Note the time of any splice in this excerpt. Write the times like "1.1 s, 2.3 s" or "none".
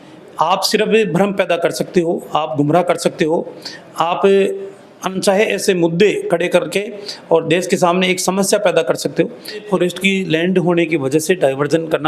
9.6 s